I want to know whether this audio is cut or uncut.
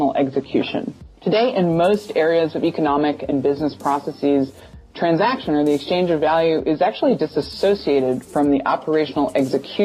cut